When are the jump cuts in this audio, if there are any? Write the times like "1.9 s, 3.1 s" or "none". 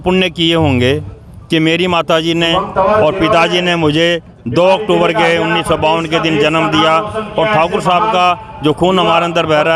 none